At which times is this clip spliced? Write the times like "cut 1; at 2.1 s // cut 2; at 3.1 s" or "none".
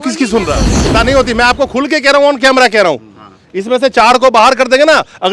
cut 1; at 0.9 s